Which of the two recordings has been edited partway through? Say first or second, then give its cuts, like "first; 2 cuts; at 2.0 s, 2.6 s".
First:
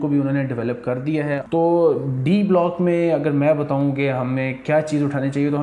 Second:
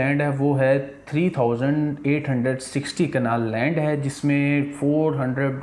first; 1 cut; at 1.4 s